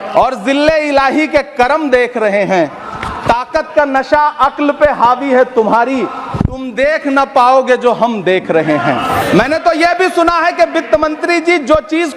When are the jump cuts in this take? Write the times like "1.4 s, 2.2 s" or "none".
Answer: 9.2 s